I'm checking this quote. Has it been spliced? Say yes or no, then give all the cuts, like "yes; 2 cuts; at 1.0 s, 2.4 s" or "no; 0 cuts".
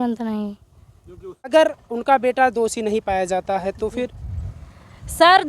yes; 1 cut; at 1.5 s